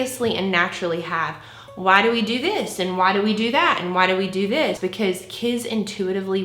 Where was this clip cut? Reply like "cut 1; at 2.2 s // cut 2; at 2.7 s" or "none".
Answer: cut 1; at 4.8 s